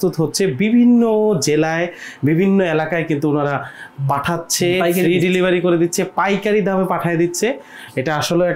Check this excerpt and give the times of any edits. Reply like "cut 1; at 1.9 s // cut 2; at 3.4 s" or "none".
none